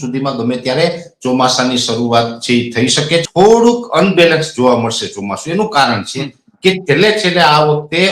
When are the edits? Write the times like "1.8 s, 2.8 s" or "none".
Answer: 3.2 s